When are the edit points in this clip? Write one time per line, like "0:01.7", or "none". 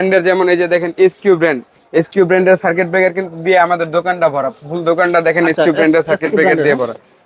none